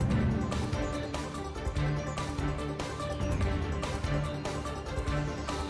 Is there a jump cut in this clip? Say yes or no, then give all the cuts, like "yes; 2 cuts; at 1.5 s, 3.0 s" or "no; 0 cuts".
no; 0 cuts